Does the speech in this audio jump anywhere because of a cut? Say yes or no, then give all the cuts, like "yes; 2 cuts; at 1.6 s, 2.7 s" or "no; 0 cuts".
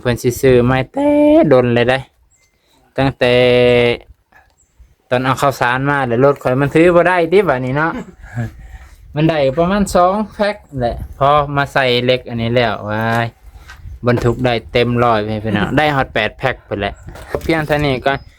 yes; 1 cut; at 17.4 s